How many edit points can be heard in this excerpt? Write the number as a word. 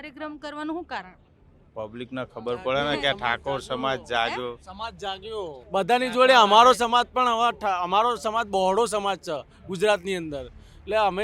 one